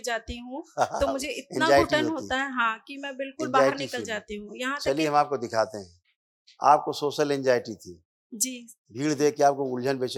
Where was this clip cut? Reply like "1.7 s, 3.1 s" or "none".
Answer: none